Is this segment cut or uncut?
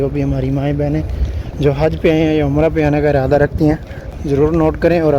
cut